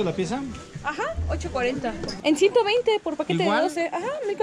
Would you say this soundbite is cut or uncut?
cut